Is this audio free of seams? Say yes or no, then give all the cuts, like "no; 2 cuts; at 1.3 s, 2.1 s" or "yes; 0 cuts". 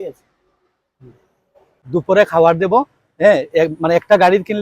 no; 1 cut; at 1.7 s